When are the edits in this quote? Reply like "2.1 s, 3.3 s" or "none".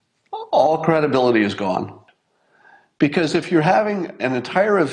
2.0 s